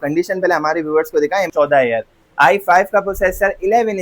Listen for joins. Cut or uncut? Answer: cut